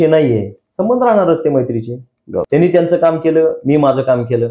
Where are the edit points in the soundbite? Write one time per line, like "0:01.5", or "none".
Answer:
0:02.4